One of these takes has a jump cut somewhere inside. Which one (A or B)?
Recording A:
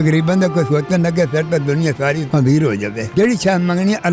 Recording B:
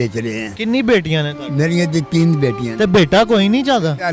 A